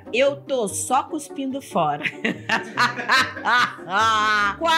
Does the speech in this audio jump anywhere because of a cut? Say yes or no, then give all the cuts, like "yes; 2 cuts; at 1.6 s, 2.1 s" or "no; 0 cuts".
no; 0 cuts